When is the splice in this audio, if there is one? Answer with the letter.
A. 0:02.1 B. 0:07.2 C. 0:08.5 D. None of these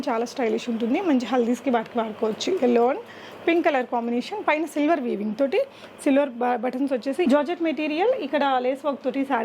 B